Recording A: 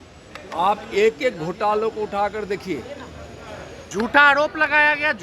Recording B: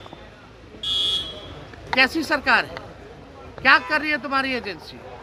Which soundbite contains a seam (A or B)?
A